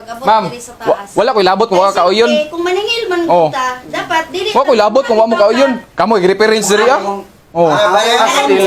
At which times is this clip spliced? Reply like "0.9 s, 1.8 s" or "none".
none